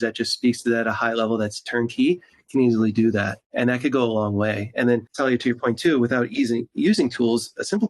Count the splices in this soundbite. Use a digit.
2